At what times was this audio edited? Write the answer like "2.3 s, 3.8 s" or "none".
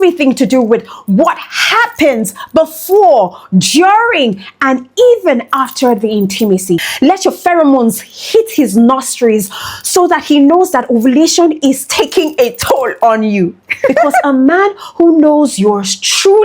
6.9 s, 14.2 s